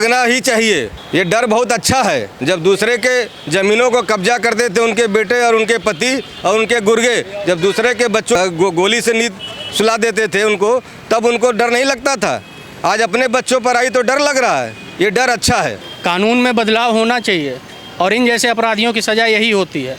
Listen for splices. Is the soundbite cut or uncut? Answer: cut